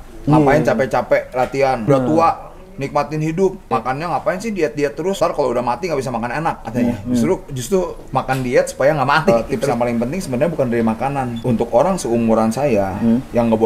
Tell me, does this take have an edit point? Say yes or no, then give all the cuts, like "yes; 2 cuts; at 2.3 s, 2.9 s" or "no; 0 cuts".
yes; 5 cuts; at 1.9 s, 3.7 s, 5.2 s, 9.3 s, 11.3 s